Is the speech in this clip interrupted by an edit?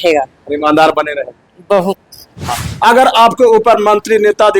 yes; 1 cut; at 2.5 s

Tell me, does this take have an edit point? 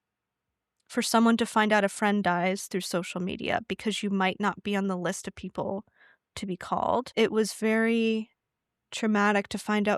yes; 1 cut; at 7.1 s

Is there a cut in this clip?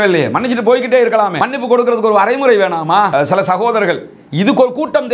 yes; 1 cut; at 3.1 s

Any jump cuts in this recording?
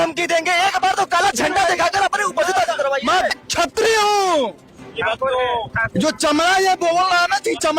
yes; 1 cut; at 3.1 s

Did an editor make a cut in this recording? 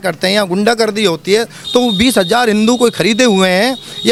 no; 0 cuts

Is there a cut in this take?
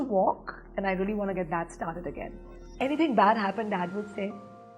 yes; 1 cut; at 2.6 s

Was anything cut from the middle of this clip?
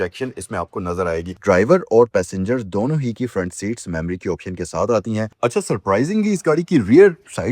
yes; 2 cuts; at 1.3 s, 5.3 s

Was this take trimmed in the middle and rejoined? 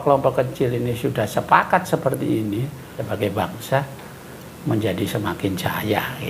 yes; 1 cut; at 3.0 s

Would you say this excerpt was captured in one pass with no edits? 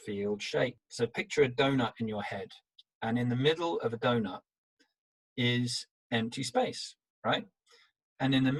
yes; 0 cuts

